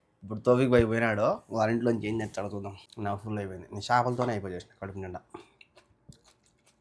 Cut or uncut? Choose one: cut